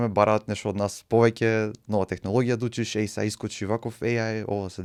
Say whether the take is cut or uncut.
uncut